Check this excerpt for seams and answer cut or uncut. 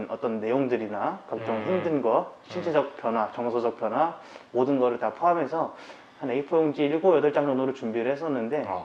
uncut